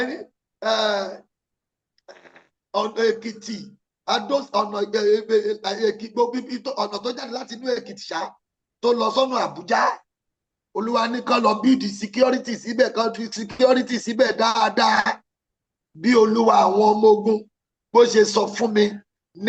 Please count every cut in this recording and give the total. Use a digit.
0